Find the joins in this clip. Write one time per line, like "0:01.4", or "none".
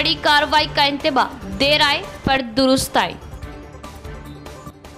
none